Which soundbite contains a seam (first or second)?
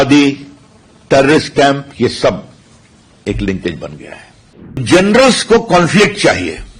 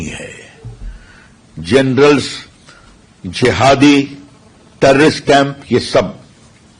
first